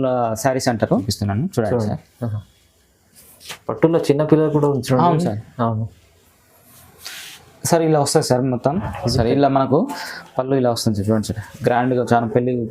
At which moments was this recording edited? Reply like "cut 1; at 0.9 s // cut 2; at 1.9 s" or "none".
cut 1; at 1.1 s // cut 2; at 8.8 s